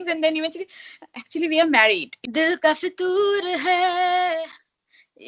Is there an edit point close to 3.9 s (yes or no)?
no